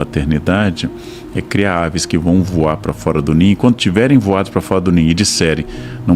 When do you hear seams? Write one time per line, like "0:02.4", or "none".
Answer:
none